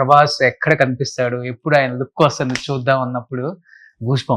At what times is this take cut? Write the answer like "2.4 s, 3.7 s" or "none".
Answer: none

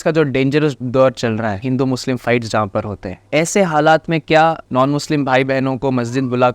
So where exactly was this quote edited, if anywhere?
1.6 s, 4.6 s

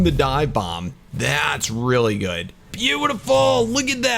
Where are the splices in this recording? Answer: 2.7 s

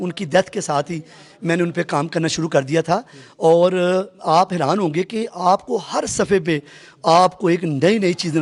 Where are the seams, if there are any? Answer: none

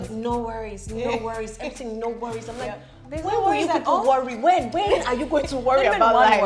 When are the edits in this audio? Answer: none

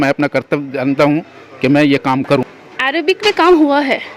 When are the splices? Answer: 2.5 s

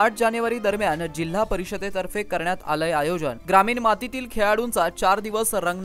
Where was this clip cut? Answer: none

